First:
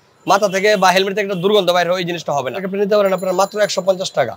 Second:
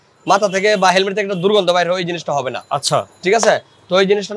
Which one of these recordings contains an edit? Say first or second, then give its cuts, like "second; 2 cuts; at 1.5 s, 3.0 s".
first; 1 cut; at 2.6 s